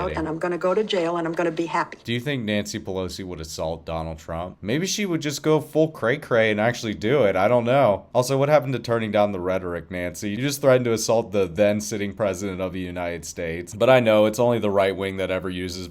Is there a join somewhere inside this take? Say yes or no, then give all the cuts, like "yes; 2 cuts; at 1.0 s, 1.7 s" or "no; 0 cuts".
yes; 1 cut; at 2.0 s